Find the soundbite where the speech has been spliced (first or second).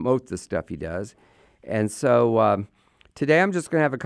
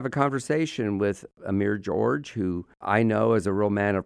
second